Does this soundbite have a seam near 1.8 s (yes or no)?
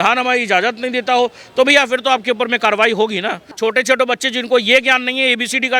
no